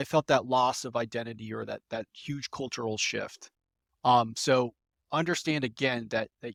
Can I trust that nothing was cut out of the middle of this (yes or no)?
yes